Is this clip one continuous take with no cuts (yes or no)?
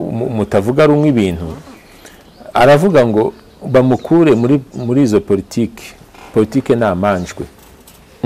yes